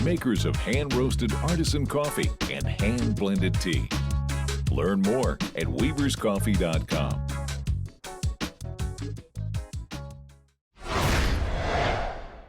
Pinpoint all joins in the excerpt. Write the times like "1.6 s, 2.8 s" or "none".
10.8 s